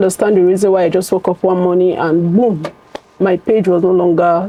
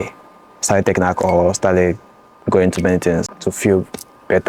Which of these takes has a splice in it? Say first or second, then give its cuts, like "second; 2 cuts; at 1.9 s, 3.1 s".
second; 1 cut; at 3.3 s